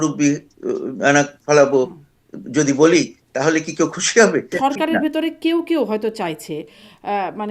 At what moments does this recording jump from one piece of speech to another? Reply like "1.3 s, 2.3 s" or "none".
4.5 s